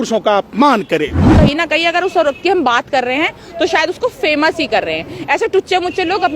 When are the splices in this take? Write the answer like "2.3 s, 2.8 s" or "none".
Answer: 1.2 s